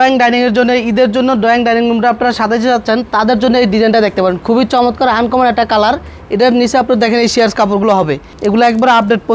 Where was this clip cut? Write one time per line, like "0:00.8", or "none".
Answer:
0:08.3